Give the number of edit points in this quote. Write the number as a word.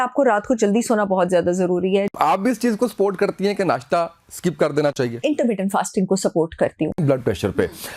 three